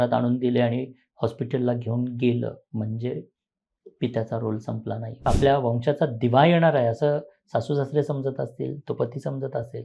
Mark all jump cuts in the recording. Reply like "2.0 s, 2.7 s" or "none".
5.3 s